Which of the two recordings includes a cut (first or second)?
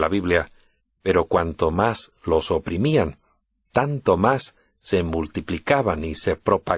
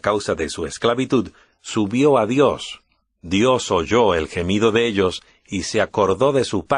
second